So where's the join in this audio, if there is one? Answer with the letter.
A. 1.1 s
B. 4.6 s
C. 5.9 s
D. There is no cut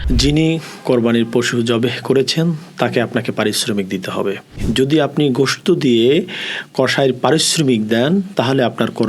B